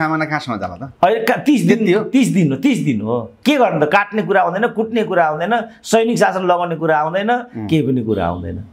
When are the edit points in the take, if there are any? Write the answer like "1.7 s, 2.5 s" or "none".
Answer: none